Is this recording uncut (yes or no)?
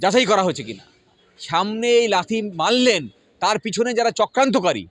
no